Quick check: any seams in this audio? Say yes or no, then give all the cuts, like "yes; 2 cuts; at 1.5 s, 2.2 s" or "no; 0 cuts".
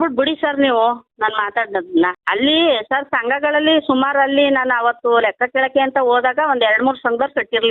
yes; 1 cut; at 2.2 s